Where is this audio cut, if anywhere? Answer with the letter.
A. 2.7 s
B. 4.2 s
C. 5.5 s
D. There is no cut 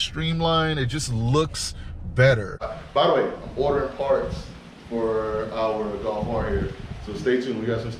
A